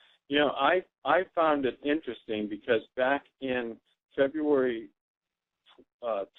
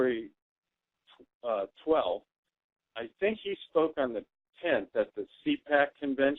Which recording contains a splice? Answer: second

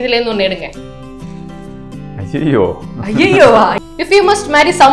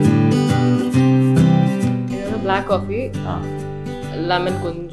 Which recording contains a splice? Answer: first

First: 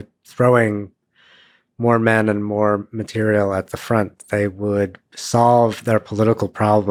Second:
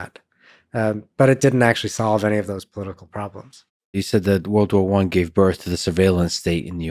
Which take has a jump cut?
second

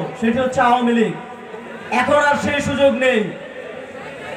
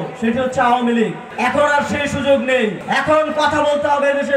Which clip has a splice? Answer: second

